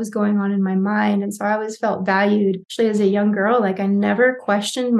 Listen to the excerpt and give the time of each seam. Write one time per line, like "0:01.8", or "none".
0:02.7